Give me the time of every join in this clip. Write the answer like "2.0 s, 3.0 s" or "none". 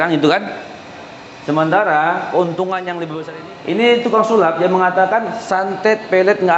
3.1 s